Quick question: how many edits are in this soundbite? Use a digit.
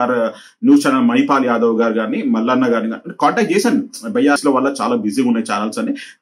1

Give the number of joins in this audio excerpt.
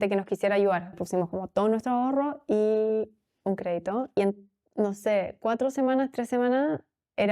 2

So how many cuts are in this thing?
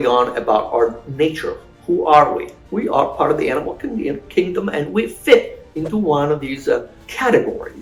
0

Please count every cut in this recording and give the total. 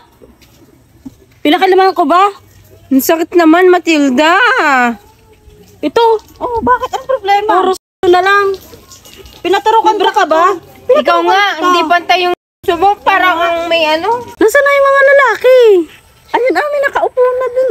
1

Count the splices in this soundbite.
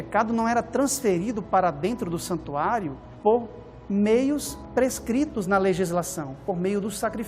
2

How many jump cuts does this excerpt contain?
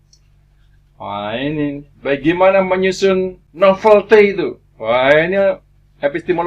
1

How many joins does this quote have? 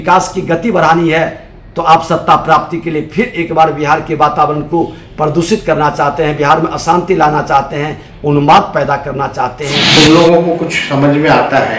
1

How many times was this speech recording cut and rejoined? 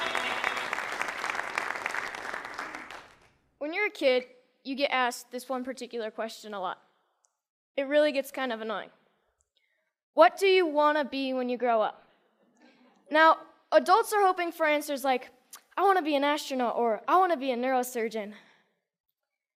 1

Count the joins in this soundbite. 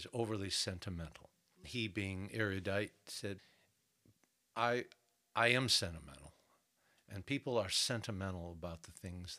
2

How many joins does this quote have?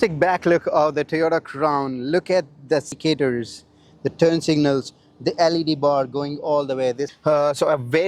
2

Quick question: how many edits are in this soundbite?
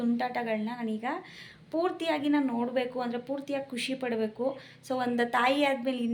0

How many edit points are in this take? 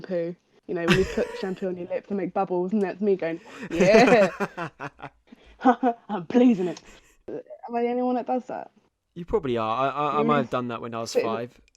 1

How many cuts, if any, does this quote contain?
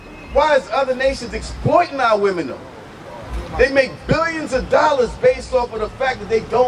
0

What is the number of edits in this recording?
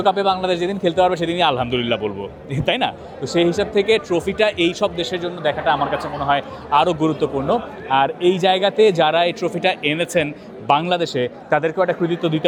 0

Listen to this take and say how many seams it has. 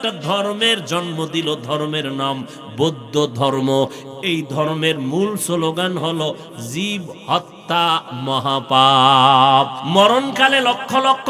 1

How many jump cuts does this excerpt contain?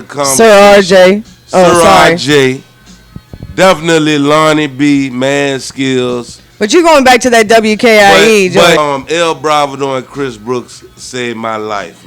1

